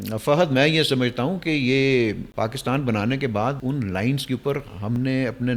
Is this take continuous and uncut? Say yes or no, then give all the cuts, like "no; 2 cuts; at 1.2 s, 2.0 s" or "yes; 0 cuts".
no; 2 cuts; at 2.3 s, 3.6 s